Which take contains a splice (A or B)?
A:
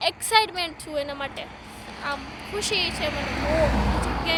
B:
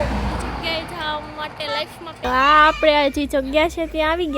B